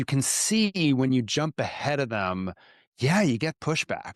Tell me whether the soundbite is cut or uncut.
uncut